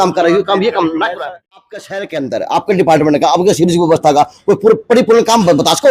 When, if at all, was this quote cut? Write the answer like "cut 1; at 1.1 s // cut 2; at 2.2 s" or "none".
cut 1; at 1.4 s

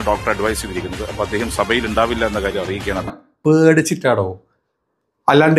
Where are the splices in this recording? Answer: cut 1; at 3.3 s

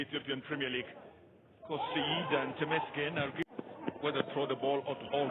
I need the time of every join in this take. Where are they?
cut 1; at 3.5 s

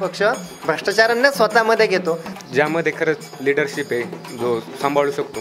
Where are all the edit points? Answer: cut 1; at 2.3 s

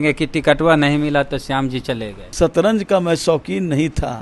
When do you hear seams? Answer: cut 1; at 2.2 s

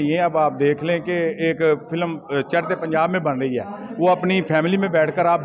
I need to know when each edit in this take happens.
none

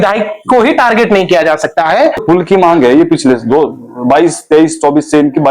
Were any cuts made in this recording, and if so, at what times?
cut 1; at 2.2 s

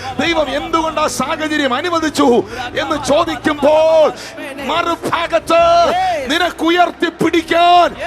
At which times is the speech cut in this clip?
none

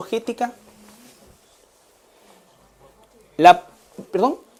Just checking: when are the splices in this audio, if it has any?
none

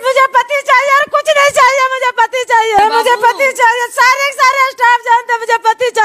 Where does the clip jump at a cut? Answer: cut 1; at 2.8 s

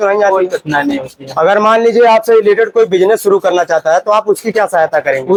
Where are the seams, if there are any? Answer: none

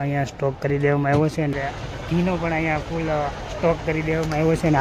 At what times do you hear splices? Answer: cut 1; at 1.5 s

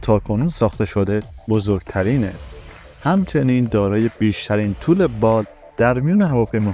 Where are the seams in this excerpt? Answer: none

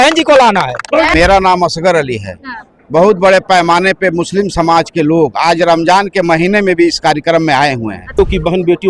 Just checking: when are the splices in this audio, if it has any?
cut 1; at 1.1 s // cut 2; at 8.1 s

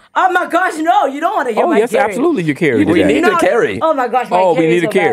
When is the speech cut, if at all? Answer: none

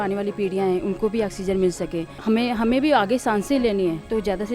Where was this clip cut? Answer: cut 1; at 2.1 s

